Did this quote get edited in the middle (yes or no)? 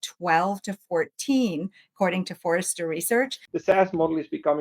yes